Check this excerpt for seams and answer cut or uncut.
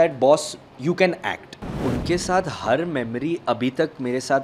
cut